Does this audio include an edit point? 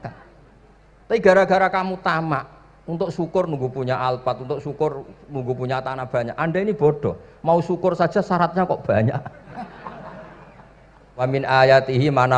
yes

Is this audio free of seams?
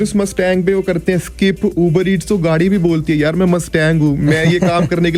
yes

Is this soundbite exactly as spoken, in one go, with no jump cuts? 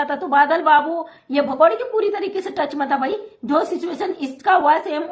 yes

